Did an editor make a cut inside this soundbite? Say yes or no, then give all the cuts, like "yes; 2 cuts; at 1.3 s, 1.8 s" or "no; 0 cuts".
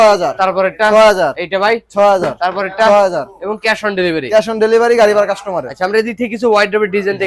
no; 0 cuts